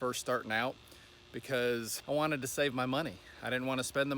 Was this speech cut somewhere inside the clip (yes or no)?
yes